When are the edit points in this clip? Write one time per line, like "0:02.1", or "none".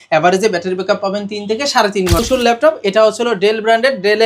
0:02.2